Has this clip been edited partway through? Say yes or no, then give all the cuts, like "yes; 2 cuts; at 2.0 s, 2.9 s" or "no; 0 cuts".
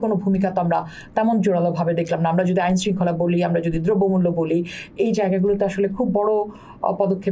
no; 0 cuts